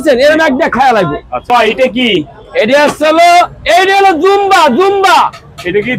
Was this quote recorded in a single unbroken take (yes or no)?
no